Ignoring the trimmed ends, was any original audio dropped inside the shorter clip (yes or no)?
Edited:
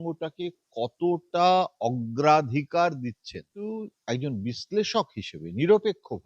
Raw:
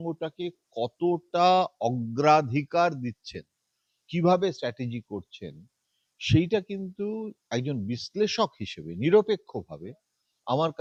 yes